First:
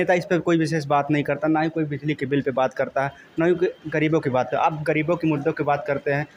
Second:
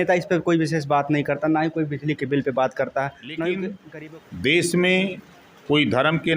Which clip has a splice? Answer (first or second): second